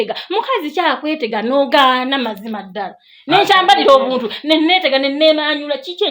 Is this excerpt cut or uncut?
uncut